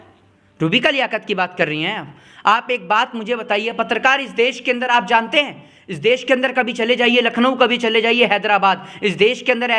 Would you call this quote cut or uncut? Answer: uncut